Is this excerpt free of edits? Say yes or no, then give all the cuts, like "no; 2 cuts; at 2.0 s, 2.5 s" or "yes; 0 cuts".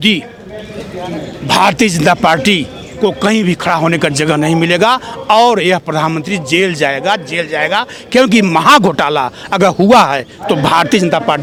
yes; 0 cuts